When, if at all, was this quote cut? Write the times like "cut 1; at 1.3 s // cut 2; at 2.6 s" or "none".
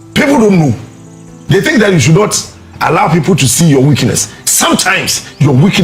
none